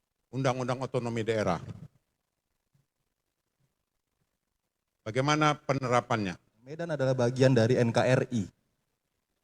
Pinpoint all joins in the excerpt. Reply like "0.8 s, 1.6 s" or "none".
6.9 s